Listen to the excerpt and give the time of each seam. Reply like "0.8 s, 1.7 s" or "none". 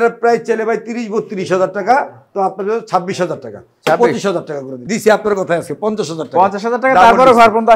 4.7 s